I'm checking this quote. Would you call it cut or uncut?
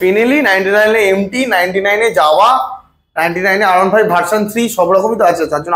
uncut